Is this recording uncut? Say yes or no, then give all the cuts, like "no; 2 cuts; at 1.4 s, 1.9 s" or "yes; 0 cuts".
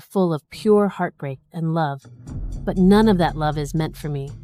yes; 0 cuts